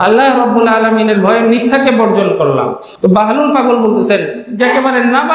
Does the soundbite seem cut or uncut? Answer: cut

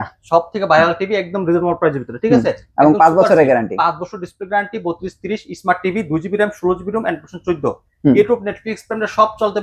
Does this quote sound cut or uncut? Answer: uncut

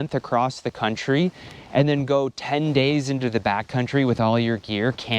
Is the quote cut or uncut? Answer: uncut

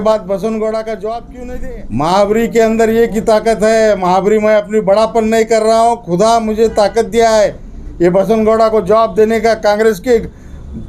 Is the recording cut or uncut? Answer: cut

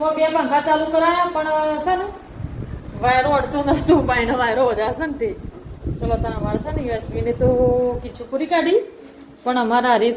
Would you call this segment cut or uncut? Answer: uncut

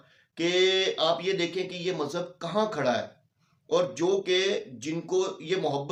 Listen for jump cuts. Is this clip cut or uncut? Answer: uncut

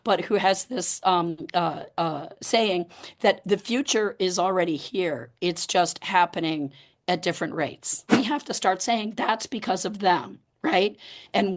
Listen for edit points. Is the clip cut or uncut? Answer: cut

